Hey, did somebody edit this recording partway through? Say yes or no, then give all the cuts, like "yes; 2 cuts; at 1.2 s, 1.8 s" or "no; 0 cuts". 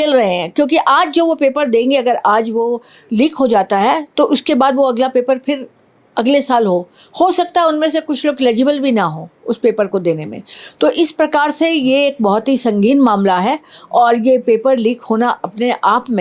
no; 0 cuts